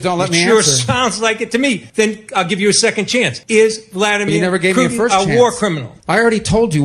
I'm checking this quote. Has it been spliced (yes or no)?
yes